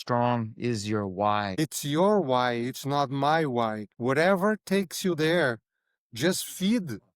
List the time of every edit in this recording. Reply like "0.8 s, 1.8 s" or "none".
1.5 s, 3.9 s